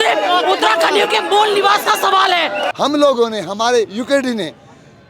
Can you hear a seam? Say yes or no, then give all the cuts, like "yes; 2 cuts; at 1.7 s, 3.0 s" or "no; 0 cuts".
yes; 1 cut; at 2.7 s